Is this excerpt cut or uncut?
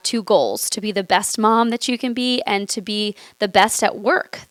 uncut